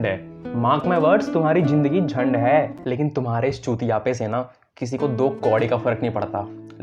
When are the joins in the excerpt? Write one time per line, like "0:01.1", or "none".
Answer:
0:02.8